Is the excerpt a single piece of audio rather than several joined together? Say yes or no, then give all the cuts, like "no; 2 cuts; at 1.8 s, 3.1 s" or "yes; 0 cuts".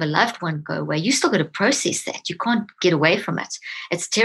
yes; 0 cuts